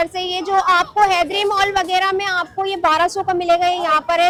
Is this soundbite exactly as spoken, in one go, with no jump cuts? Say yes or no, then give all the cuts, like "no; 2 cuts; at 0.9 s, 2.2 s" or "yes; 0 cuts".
yes; 0 cuts